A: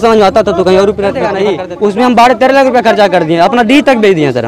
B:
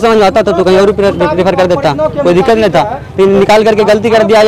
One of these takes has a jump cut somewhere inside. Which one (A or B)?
A